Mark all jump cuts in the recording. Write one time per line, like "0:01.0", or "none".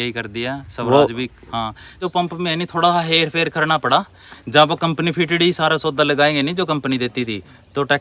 0:02.0